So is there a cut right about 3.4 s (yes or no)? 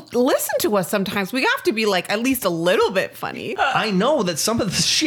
yes